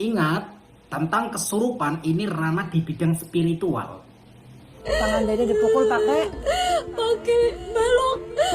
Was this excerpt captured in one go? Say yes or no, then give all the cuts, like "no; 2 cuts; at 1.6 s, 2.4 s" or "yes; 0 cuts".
no; 1 cut; at 4.6 s